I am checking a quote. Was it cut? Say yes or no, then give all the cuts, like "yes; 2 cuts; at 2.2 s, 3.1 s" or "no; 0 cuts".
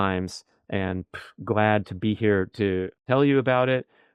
yes; 1 cut; at 2.9 s